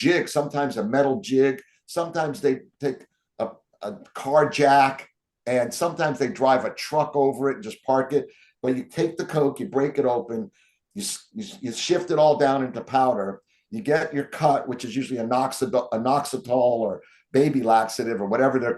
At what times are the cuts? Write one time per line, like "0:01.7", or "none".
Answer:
none